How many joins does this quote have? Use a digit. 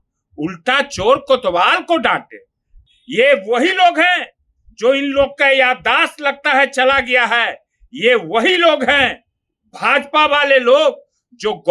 1